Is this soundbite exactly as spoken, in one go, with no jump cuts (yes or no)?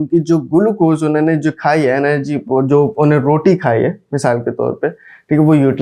yes